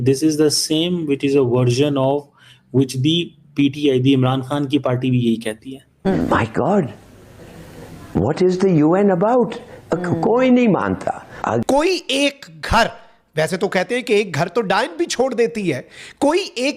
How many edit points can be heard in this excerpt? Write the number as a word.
two